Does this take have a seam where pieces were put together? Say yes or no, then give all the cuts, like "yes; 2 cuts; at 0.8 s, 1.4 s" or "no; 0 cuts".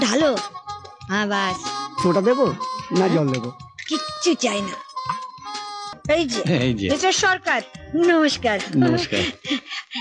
yes; 1 cut; at 6.0 s